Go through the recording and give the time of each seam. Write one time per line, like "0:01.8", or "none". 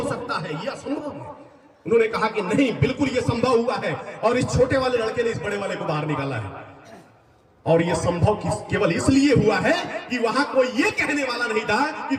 none